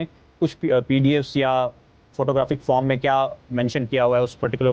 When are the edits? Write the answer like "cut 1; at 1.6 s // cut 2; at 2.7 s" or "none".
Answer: none